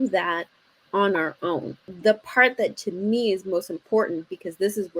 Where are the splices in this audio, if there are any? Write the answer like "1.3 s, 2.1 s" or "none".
1.9 s